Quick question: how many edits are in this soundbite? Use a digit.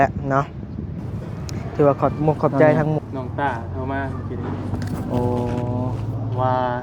1